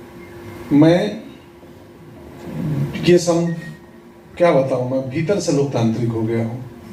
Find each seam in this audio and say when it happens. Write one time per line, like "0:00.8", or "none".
none